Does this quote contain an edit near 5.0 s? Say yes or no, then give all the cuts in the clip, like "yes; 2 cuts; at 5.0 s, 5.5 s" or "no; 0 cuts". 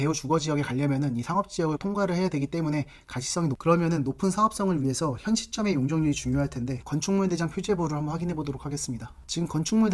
no; 2 cuts; at 3.6 s, 6.8 s